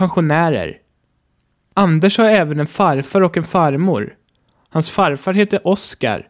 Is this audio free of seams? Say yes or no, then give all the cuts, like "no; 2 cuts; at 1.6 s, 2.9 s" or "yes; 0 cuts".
no; 2 cuts; at 1.2 s, 4.3 s